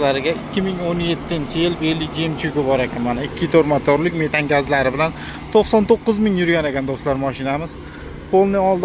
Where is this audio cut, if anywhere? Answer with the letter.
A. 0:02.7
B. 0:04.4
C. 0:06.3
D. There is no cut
D